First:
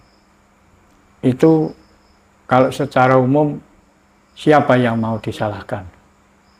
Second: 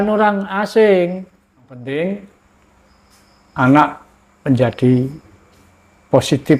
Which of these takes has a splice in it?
second; 1 cut; at 1.8 s

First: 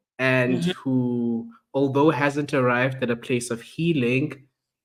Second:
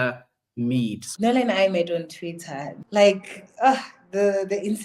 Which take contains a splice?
second; 2 cuts; at 1.0 s, 2.7 s

